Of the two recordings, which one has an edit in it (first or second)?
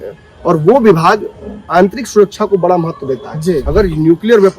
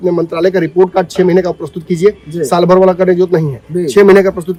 first